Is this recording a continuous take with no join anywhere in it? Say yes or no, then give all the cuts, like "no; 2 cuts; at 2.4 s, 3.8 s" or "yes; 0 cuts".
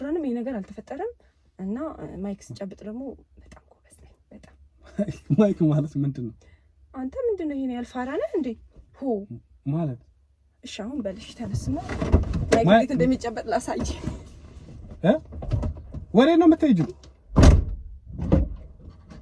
yes; 0 cuts